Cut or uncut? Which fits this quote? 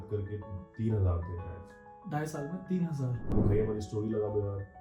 cut